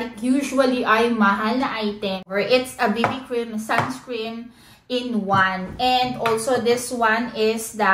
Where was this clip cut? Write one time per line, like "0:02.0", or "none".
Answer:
0:02.3